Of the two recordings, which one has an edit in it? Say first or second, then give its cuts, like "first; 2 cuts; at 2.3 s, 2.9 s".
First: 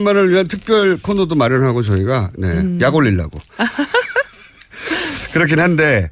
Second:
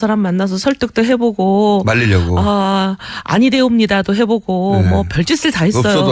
second; 1 cut; at 4.9 s